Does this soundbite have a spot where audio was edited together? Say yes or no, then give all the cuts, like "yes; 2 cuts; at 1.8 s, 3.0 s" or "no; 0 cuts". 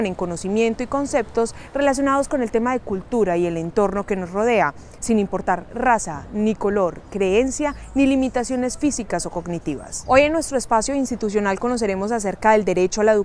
yes; 1 cut; at 7.3 s